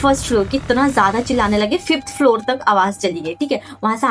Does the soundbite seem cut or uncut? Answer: uncut